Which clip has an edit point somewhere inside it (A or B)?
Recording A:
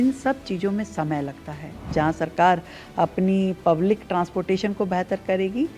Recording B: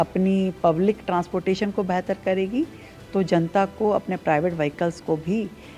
A